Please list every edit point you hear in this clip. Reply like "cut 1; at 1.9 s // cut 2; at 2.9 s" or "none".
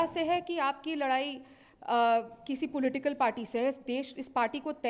none